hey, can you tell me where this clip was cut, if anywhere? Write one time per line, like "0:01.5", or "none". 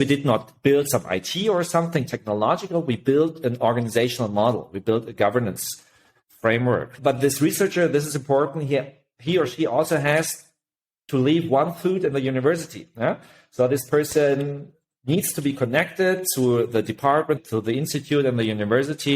0:06.9
0:17.4